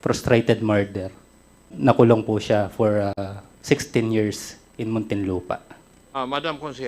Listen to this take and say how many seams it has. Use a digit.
2